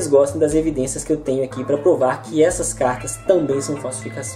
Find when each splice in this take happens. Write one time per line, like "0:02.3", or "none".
0:01.0